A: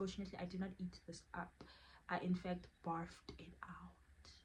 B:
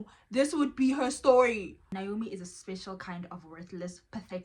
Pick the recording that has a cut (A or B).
B